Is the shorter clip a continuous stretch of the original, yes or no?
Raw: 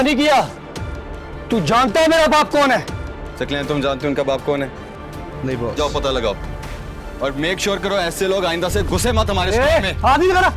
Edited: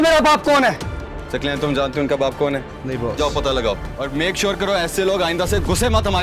no